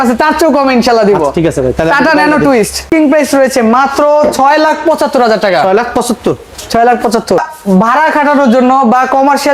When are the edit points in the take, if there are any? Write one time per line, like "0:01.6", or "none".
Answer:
0:02.8